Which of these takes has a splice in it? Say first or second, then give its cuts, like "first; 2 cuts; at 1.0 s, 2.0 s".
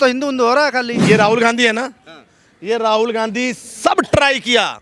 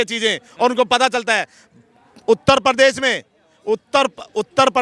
first; 1 cut; at 0.9 s